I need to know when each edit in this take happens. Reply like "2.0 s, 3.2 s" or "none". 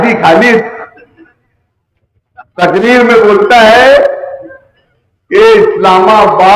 none